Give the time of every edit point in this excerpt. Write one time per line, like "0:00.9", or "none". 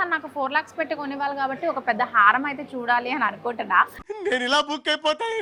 none